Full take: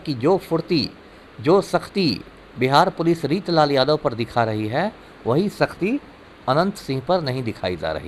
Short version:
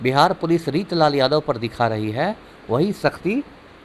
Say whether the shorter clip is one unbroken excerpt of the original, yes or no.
yes